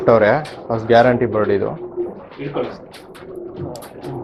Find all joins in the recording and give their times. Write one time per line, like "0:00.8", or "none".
none